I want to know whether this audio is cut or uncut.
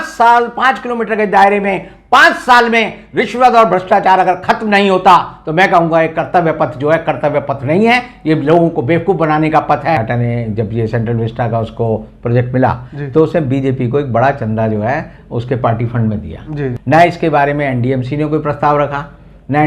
cut